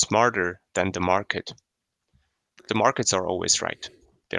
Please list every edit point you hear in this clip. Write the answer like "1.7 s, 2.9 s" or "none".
2.6 s